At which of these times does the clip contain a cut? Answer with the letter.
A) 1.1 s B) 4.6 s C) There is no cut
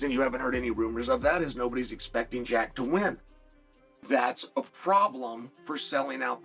C